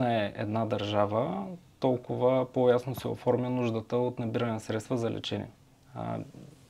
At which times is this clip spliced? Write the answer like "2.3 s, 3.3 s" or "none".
none